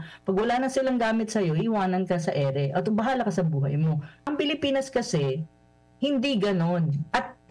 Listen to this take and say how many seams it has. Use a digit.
1